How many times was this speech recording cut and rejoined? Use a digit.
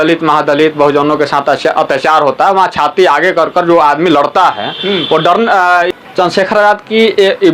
1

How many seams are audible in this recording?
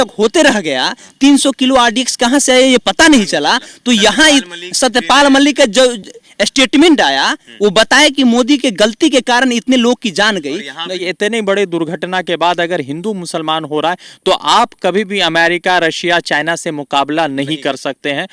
1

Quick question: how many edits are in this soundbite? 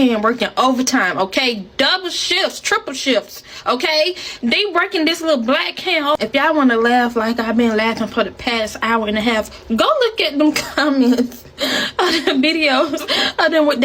0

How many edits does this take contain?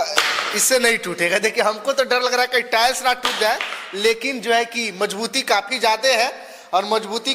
0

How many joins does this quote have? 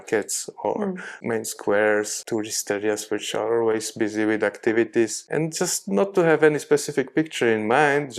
3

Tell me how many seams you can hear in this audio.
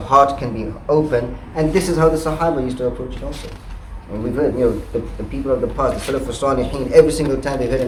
0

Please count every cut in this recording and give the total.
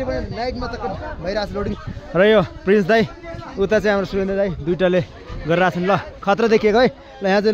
0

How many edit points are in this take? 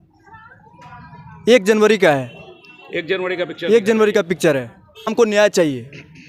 1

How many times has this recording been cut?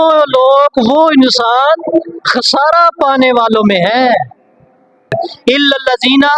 1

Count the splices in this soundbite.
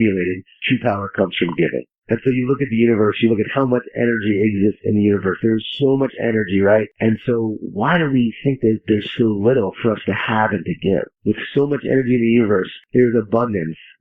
4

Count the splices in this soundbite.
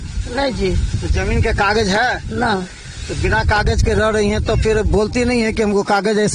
0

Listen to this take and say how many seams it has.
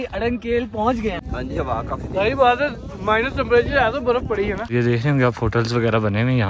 2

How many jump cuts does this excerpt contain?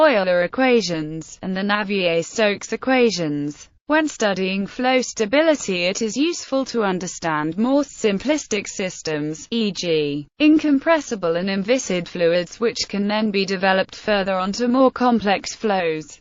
1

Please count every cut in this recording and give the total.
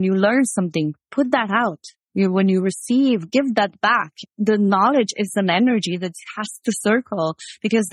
1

